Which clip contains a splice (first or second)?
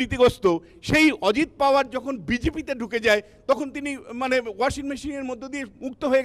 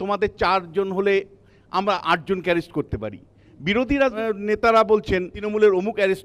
second